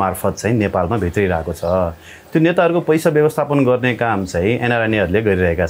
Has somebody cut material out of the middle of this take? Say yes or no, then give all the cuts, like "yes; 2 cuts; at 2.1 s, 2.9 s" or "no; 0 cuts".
no; 0 cuts